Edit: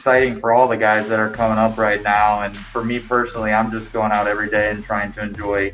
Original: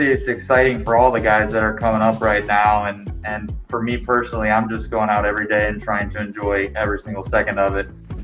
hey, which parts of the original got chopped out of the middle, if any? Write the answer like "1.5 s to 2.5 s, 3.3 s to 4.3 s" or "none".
3.0 s to 3.6 s